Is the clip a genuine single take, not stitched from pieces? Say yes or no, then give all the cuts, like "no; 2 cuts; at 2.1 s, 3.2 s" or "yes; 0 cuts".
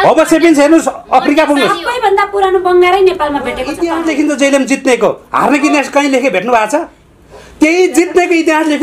no; 1 cut; at 3.7 s